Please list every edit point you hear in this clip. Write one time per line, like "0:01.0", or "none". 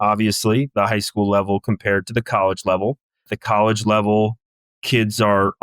0:03.3

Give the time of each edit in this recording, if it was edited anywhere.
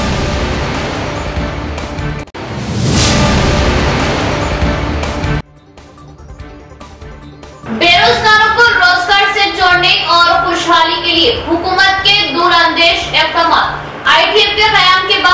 0:02.2
0:07.0

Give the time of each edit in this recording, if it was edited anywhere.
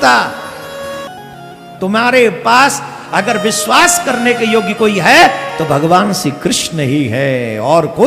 0:01.1

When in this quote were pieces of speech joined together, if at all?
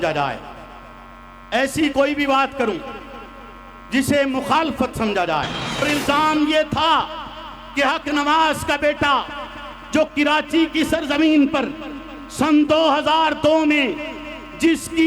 0:05.8

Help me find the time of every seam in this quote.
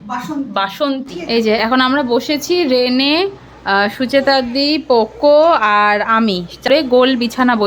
0:01.2
0:06.9

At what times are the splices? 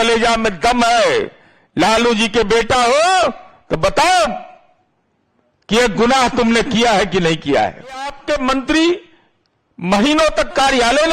0:08.2

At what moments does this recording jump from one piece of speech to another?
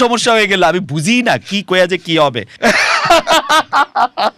0:02.5

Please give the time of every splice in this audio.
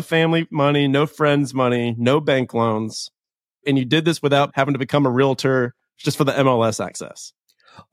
0:04.5

